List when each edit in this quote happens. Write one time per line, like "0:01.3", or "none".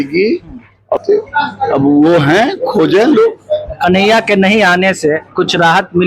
0:01.0